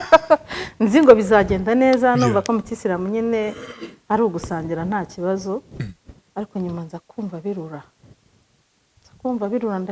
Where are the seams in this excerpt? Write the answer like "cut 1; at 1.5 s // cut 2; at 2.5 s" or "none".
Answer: none